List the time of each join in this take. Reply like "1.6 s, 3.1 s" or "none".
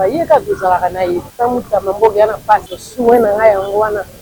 1.3 s, 2.8 s